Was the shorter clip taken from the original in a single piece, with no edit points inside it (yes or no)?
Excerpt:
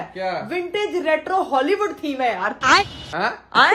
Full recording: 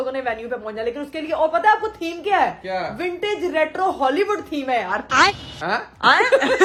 yes